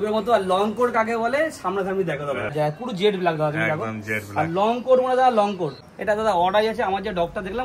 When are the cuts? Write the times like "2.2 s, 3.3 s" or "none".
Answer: 2.5 s, 5.9 s